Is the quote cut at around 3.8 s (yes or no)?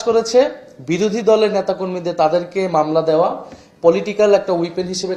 no